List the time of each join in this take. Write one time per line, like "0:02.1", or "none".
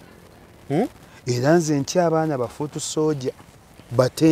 none